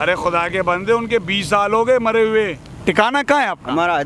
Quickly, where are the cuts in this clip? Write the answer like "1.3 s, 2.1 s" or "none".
2.7 s